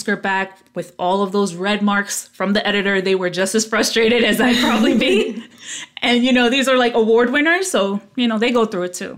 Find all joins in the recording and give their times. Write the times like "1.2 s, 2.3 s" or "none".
none